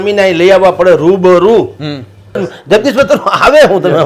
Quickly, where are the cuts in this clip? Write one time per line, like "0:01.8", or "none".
0:02.4